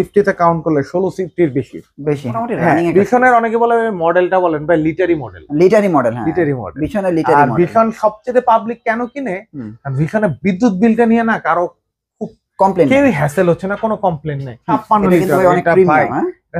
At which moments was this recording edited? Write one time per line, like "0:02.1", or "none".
0:02.3
0:14.7